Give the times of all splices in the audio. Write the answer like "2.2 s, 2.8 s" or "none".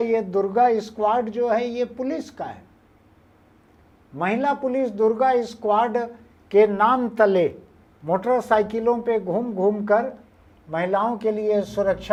none